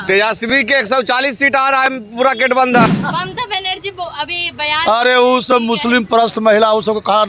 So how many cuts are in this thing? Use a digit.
1